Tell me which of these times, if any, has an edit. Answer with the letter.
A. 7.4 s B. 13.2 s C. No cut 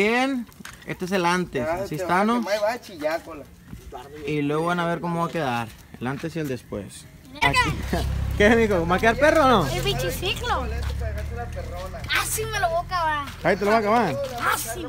A